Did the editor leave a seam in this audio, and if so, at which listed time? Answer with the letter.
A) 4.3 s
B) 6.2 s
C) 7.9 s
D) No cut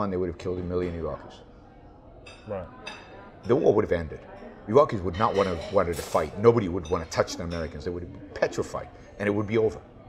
D